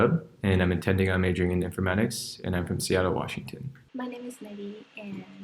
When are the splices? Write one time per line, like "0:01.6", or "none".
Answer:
0:03.8